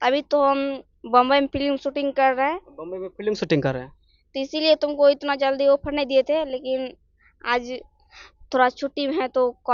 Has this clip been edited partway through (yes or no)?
no